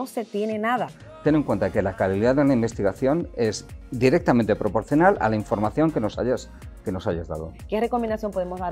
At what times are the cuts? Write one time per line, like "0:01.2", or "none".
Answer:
0:01.0
0:07.5

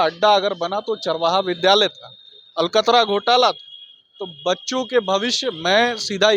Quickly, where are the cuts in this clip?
none

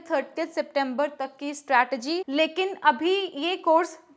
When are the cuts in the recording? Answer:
0:02.3

